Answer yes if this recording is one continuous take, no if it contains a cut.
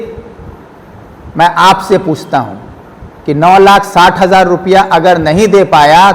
yes